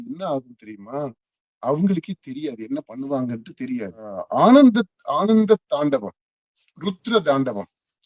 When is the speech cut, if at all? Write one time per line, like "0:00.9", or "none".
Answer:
0:04.2